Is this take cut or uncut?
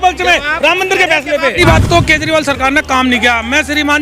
cut